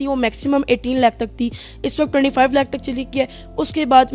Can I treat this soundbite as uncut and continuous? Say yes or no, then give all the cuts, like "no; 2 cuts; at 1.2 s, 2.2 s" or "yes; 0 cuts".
yes; 0 cuts